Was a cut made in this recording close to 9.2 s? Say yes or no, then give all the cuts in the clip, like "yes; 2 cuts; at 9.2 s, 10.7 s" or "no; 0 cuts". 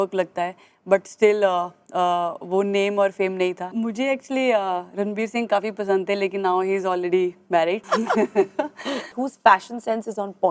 yes; 3 cuts; at 3.7 s, 7.8 s, 9.2 s